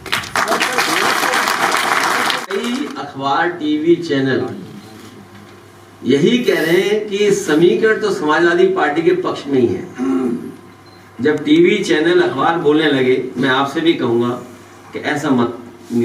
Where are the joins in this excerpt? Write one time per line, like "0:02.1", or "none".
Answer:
0:02.5